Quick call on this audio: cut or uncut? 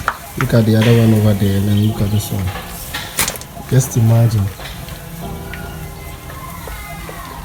uncut